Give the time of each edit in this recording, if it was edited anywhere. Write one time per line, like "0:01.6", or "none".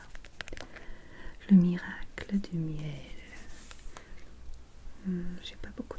0:04.1